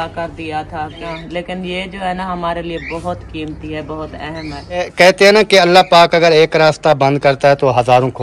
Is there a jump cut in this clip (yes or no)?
yes